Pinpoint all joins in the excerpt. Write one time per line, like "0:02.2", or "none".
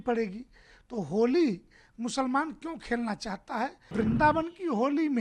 0:03.9